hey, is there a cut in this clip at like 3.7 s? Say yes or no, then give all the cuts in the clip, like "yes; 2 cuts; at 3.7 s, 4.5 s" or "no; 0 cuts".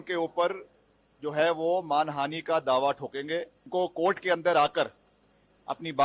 yes; 1 cut; at 3.7 s